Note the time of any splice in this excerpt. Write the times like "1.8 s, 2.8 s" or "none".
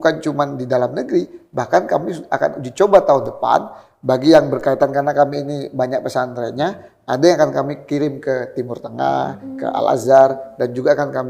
none